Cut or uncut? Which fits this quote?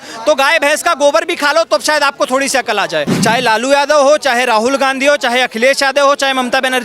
cut